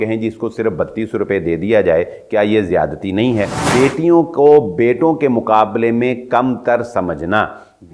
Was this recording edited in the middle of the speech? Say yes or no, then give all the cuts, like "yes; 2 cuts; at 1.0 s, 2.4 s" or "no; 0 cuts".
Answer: yes; 1 cut; at 3.6 s